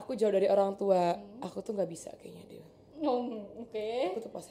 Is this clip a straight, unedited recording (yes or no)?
yes